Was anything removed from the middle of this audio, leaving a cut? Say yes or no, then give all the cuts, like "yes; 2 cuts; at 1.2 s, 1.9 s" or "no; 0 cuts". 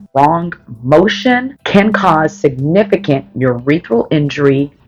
no; 0 cuts